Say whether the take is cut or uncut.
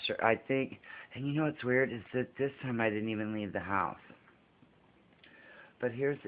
cut